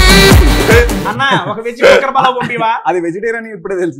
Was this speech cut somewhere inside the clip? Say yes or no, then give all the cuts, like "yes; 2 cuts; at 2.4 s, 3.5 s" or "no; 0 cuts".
yes; 1 cut; at 1.1 s